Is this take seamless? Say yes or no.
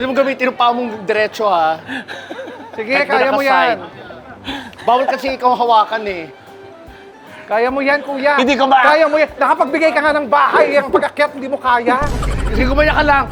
yes